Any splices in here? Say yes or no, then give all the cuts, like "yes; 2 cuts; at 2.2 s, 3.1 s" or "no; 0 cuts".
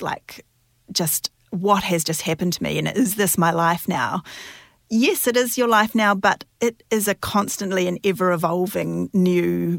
no; 0 cuts